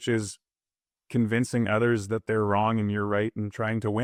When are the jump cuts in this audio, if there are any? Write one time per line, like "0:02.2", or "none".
none